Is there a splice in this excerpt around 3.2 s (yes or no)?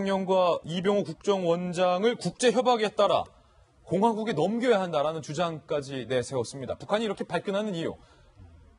yes